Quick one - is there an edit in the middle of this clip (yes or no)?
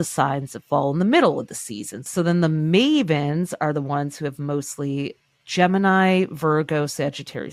yes